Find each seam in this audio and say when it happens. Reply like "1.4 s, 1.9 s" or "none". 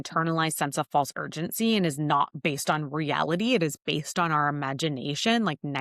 none